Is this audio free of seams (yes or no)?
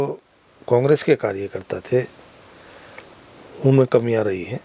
yes